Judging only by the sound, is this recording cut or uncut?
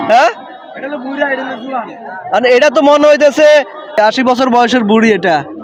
uncut